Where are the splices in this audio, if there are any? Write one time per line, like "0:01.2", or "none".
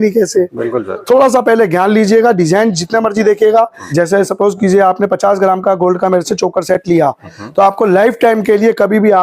0:03.8